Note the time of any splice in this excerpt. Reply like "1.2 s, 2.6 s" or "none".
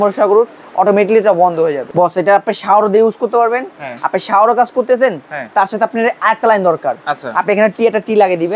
1.8 s